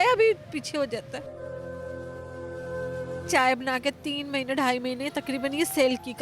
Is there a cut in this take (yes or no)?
yes